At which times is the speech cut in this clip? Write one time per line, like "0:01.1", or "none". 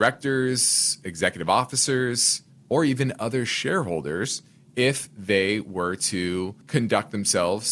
0:06.6